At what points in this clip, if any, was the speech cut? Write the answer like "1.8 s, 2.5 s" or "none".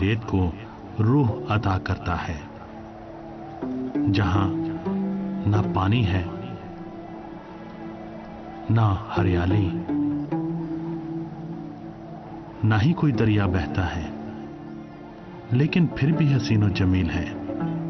11.6 s